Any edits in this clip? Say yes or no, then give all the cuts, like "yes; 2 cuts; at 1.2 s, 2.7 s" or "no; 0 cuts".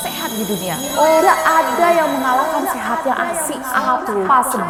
no; 0 cuts